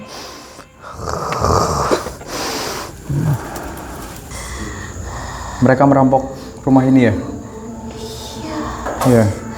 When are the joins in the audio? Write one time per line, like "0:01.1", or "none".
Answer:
0:04.2